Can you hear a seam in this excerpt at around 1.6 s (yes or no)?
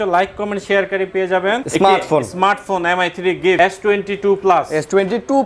yes